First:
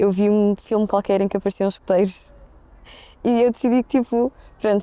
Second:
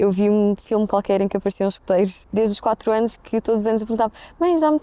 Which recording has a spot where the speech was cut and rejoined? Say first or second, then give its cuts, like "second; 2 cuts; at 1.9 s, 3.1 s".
second; 1 cut; at 2.2 s